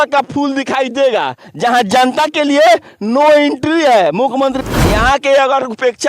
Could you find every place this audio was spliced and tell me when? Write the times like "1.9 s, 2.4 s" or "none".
4.6 s